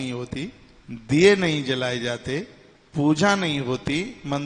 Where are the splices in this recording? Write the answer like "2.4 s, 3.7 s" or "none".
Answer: none